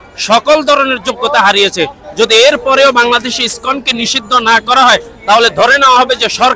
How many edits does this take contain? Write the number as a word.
zero